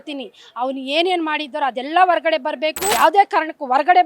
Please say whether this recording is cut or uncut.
cut